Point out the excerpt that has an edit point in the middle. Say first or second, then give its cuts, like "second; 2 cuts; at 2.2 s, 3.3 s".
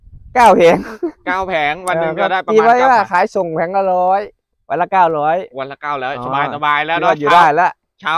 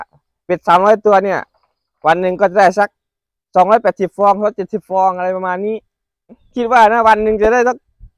second; 1 cut; at 6.4 s